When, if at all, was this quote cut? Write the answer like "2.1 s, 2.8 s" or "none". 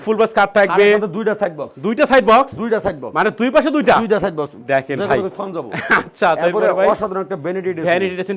none